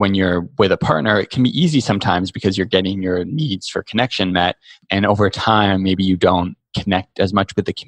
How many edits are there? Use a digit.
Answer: 1